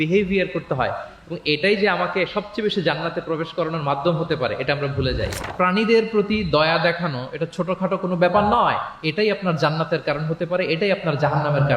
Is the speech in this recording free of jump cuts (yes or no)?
no